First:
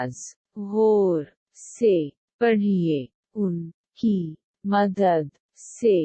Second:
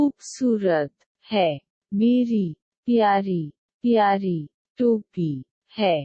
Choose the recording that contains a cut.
second; 1 cut; at 1.7 s

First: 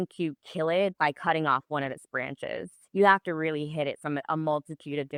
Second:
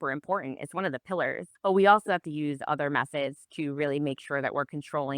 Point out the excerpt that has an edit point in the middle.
second; 1 cut; at 1.5 s

